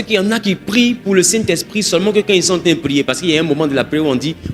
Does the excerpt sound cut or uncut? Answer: uncut